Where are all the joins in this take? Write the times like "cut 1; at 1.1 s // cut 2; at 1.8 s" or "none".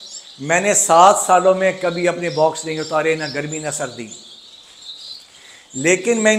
none